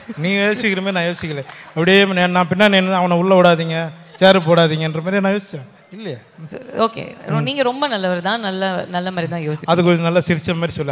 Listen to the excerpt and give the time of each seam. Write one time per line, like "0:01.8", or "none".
none